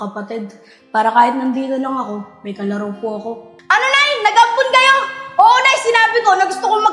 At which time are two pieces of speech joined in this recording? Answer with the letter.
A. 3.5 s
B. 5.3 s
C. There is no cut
A